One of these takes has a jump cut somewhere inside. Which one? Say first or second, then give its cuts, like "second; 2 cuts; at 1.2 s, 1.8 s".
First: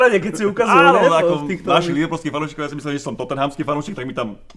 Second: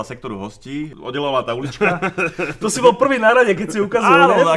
second; 1 cut; at 0.9 s